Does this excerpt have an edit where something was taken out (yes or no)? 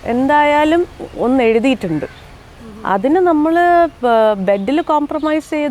no